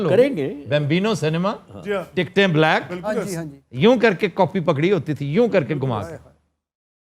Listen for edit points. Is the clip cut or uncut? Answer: uncut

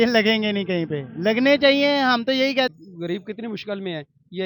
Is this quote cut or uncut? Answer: cut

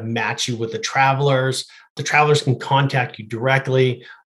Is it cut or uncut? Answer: cut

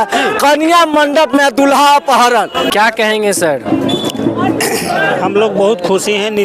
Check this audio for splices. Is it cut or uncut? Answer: cut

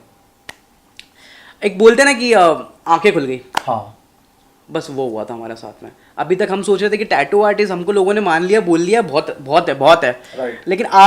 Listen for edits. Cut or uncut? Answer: uncut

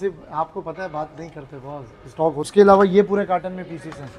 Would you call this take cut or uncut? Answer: cut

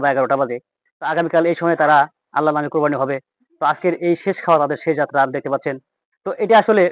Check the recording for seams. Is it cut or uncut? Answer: uncut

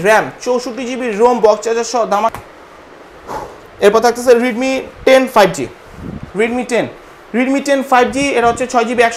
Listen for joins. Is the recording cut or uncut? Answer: cut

